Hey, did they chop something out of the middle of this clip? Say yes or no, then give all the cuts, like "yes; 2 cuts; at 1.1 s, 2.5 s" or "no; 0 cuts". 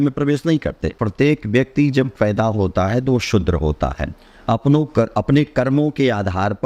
yes; 1 cut; at 1.0 s